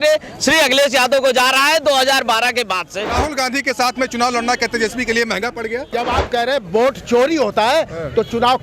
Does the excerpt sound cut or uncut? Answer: cut